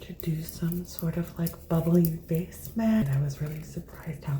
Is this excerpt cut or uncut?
cut